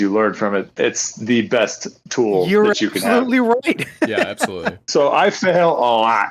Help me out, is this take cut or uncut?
uncut